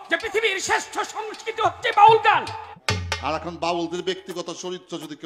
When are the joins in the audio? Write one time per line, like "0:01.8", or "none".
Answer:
0:02.8